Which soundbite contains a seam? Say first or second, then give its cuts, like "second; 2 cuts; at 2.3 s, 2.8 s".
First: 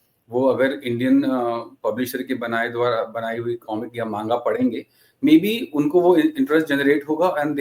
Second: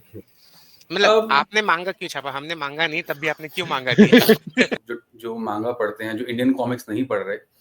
second; 1 cut; at 4.7 s